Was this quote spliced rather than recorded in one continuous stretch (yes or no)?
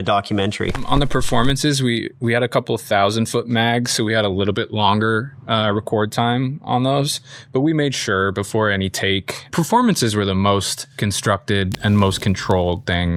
no